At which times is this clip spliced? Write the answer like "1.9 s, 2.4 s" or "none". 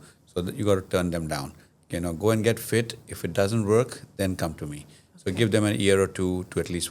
none

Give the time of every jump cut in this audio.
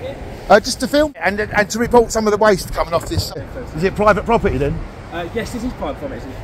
1.7 s, 3.4 s

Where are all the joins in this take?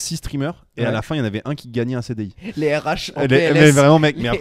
2.4 s

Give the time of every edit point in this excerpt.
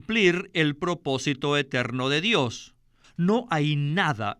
2.7 s

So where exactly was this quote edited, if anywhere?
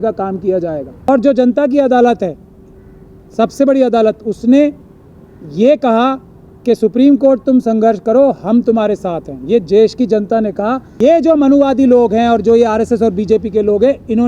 1.1 s, 10.9 s

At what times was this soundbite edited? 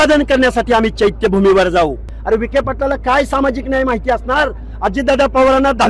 2.1 s

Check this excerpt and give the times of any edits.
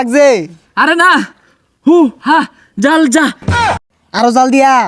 3.6 s

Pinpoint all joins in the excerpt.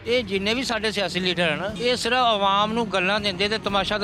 1.7 s

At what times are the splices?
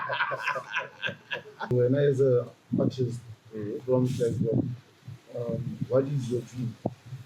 1.7 s

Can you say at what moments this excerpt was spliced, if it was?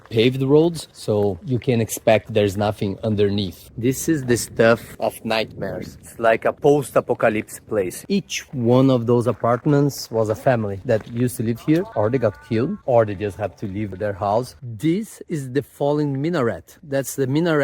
3.6 s, 8.0 s, 14.6 s

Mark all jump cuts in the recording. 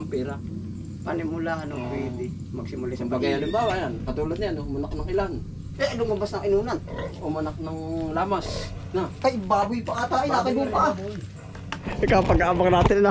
11.9 s

